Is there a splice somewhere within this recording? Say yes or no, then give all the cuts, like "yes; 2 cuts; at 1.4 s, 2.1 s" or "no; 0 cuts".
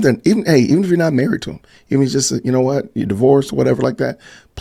no; 0 cuts